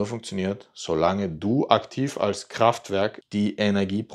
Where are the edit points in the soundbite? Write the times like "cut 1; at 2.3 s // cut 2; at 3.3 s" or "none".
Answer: cut 1; at 3.2 s